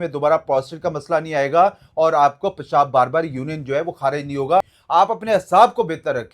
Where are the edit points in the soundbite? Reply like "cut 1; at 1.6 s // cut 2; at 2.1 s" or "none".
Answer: cut 1; at 4.7 s